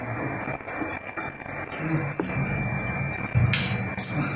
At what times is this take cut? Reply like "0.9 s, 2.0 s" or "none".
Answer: 2.3 s